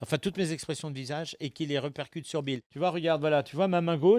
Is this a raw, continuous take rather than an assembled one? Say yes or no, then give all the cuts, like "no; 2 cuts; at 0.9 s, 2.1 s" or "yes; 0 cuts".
no; 1 cut; at 2.6 s